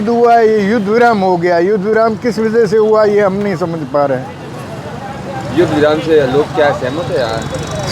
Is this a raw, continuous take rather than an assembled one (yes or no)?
yes